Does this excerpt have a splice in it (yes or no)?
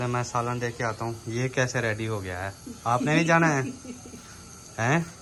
no